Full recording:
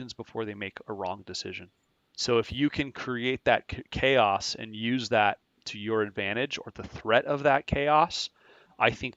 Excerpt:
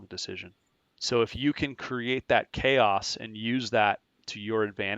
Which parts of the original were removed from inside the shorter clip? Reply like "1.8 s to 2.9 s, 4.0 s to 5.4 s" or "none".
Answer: 3.7 s to 3.9 s